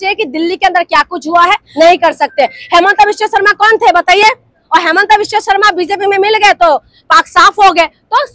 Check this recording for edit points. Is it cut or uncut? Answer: cut